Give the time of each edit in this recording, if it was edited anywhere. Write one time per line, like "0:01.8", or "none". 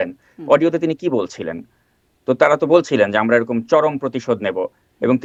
none